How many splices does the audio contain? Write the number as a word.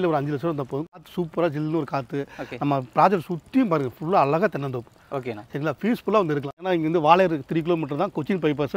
two